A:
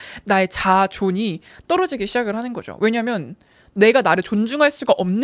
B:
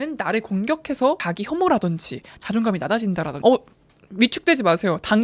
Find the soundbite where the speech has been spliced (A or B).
B